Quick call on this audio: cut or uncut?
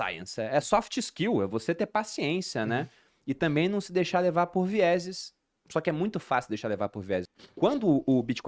cut